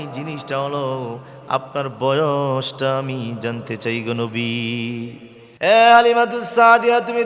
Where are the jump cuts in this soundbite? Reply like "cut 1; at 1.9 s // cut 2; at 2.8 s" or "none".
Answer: cut 1; at 5.4 s